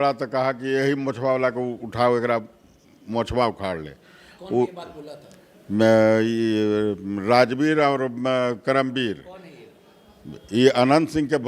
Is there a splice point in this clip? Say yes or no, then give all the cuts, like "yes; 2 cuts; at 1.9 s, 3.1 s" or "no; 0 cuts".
no; 0 cuts